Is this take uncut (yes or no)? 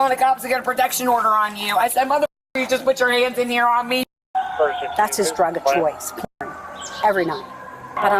no